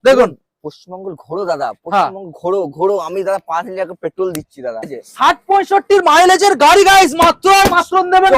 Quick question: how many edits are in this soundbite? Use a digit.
1